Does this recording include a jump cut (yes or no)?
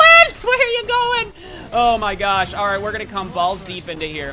no